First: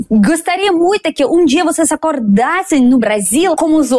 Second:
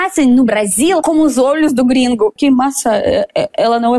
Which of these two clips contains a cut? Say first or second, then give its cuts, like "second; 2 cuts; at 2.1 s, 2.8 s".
second; 1 cut; at 2.4 s